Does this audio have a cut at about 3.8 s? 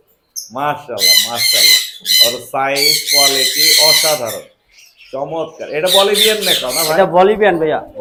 no; 0 cuts

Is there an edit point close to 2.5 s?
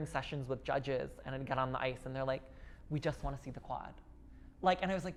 no; 0 cuts

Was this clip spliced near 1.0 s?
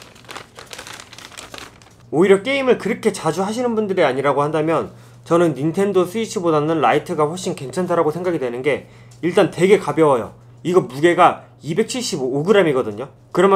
no; 0 cuts

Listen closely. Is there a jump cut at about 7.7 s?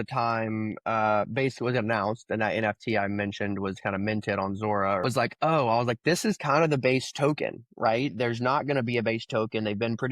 no; 1 cut; at 5.0 s

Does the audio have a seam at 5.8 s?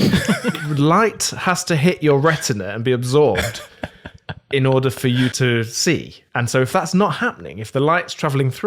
yes; 1 cut; at 5.8 s

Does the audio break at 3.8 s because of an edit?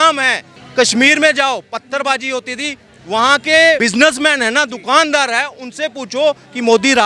yes; 1 cut; at 3.8 s

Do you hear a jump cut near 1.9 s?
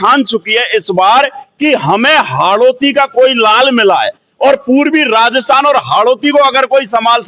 no; 0 cuts

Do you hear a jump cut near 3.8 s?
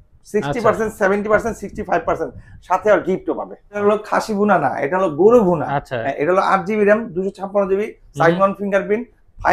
yes; 1 cut; at 3.8 s

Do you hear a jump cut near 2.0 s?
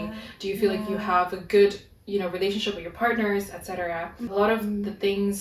no; 1 cut; at 4.3 s

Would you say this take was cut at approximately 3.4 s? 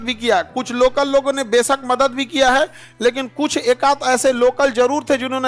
no; 0 cuts

